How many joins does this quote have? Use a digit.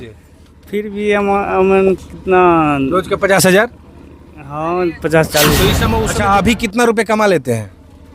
1